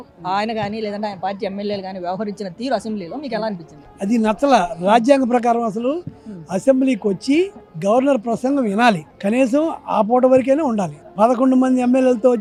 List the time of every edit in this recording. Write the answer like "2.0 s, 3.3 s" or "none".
none